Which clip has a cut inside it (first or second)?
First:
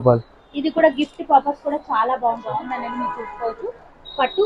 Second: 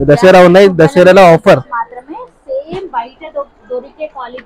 first